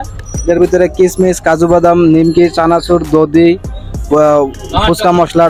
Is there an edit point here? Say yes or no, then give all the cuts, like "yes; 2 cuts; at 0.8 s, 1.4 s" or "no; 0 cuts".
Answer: no; 0 cuts